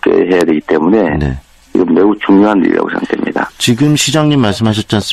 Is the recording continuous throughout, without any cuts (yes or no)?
no